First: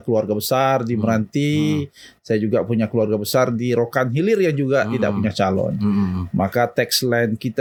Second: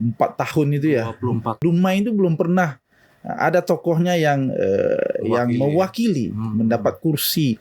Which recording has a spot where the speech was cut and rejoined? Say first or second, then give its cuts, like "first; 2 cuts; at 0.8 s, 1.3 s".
second; 1 cut; at 1.6 s